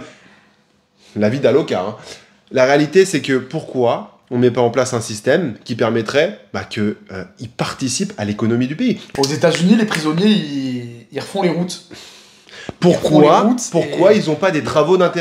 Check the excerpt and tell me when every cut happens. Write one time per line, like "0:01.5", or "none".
none